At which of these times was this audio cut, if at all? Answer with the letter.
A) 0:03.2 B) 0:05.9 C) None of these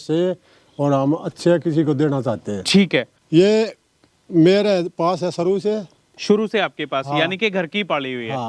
A